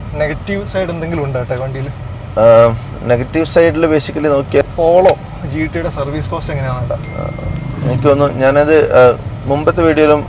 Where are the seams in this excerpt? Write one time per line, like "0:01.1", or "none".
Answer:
0:04.6